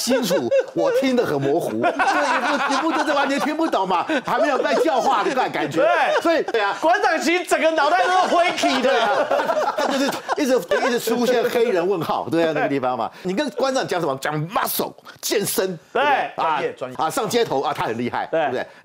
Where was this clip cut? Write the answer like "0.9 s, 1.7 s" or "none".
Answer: 6.6 s, 10.7 s, 13.2 s, 16.9 s